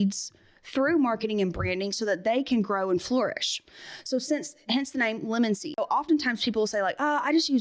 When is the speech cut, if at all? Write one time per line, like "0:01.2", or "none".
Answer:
0:05.7